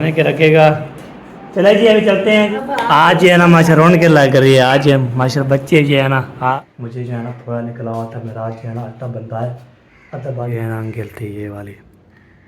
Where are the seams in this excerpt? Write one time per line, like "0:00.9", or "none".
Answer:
0:02.5
0:06.7
0:10.5